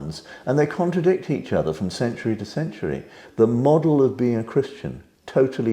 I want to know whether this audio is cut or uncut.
cut